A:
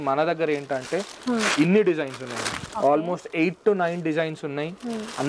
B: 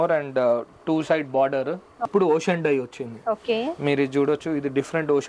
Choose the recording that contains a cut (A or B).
B